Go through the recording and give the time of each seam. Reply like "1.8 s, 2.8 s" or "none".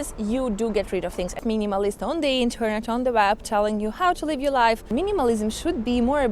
1.4 s, 4.9 s